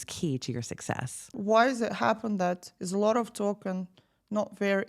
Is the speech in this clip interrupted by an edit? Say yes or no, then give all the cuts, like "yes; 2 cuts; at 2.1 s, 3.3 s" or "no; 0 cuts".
yes; 1 cut; at 1.3 s